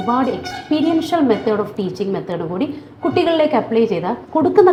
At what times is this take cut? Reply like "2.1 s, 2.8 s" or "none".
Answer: none

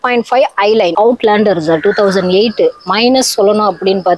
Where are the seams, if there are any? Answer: 0.9 s

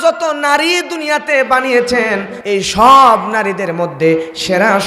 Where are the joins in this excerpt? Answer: 2.3 s

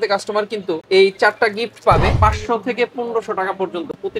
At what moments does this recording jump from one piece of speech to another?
2.1 s

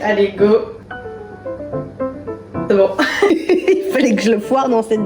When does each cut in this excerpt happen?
3.3 s

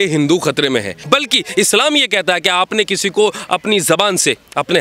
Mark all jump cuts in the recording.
0.9 s

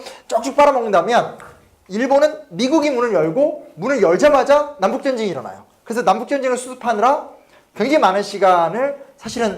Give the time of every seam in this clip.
4.0 s

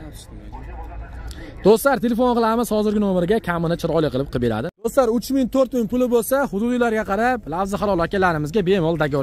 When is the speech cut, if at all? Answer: 4.9 s

